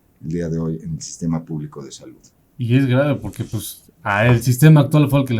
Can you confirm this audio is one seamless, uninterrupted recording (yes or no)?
yes